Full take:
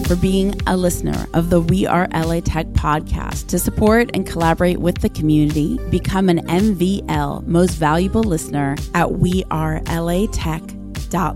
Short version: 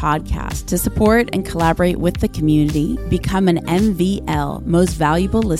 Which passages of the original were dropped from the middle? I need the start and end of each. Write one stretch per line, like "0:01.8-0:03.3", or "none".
none